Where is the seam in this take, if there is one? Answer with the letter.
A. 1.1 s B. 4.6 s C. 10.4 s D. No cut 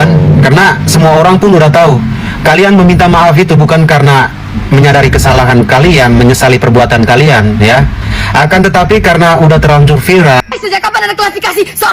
C